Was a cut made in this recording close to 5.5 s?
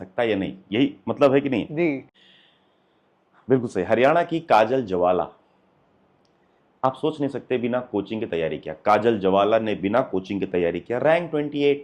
no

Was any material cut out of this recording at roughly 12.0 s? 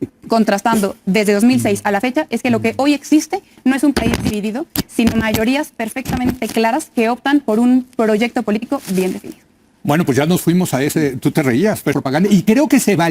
yes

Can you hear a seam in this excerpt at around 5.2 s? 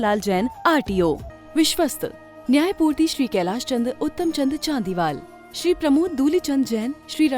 no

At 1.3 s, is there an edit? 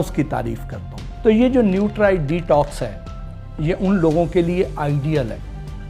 yes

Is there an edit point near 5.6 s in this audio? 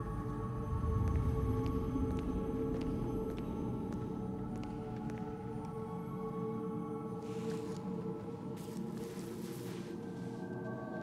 no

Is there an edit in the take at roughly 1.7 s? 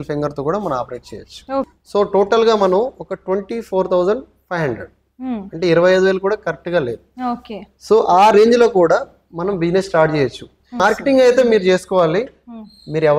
yes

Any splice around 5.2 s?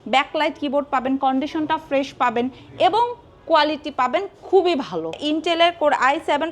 yes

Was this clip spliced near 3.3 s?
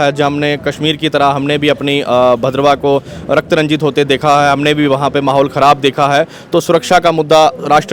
no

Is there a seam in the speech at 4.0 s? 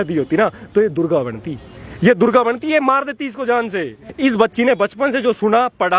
yes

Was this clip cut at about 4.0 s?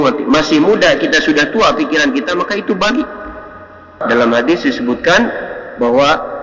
yes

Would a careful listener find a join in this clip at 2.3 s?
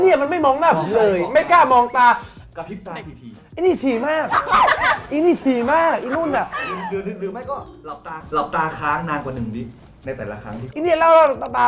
yes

